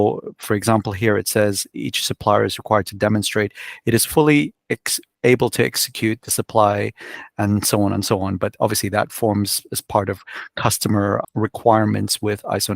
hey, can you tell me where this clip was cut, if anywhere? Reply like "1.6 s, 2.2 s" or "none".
11.2 s